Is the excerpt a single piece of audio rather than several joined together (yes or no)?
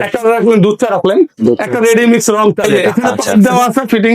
no